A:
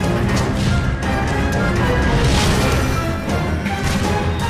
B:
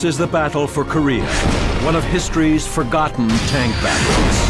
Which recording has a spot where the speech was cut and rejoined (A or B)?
B